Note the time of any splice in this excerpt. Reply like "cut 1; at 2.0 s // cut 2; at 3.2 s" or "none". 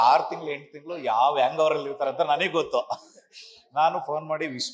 none

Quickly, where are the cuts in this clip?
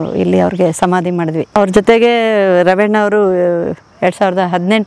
cut 1; at 1.5 s

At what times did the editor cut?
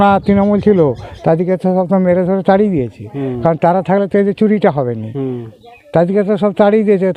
none

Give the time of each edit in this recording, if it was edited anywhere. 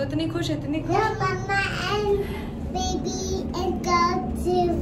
none

